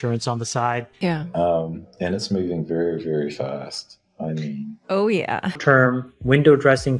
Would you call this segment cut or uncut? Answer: cut